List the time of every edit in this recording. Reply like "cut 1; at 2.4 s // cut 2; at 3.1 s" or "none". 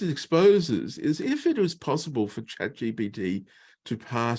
none